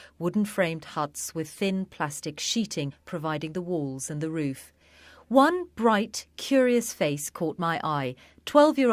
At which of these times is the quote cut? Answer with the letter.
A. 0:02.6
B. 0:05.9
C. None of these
C